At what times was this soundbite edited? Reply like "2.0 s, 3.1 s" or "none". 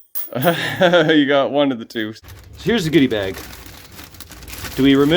2.1 s